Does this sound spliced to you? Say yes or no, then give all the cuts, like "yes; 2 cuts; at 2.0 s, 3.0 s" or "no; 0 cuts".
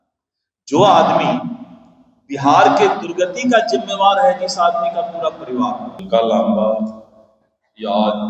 yes; 1 cut; at 5.9 s